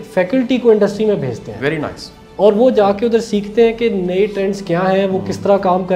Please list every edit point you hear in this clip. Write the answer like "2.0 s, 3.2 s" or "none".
none